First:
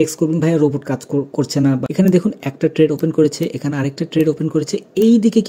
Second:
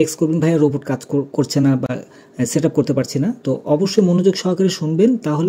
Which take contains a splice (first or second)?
first